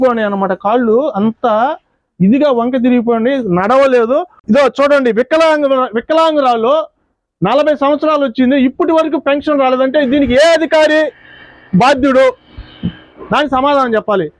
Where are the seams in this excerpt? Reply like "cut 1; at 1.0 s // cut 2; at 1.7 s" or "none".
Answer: cut 1; at 4.3 s